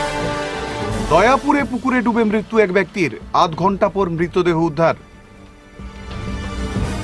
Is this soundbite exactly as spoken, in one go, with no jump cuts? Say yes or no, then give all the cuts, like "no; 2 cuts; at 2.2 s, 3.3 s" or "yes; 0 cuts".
no; 1 cut; at 0.9 s